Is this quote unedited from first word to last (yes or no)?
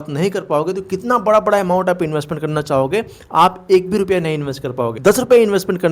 no